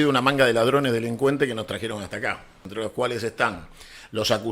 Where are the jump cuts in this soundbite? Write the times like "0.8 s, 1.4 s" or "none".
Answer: 2.6 s